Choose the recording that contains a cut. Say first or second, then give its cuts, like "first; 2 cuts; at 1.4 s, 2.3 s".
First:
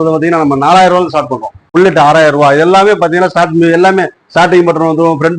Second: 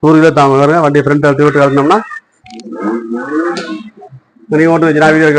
first; 1 cut; at 1.6 s